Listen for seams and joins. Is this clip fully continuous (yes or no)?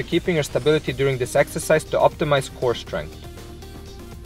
no